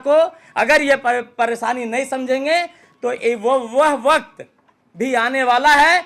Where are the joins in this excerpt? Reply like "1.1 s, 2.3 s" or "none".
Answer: none